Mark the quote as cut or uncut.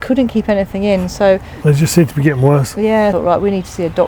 cut